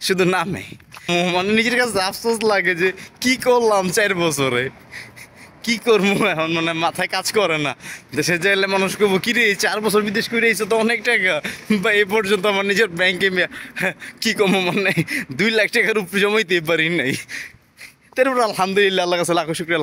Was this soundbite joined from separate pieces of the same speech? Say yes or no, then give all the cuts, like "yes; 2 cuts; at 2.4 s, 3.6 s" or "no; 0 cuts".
yes; 1 cut; at 1.1 s